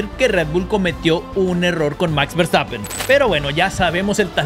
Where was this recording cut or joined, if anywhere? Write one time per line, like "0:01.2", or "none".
0:02.9